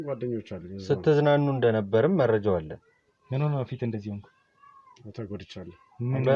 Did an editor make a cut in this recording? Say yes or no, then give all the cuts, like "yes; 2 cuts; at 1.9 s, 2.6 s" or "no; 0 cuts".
no; 0 cuts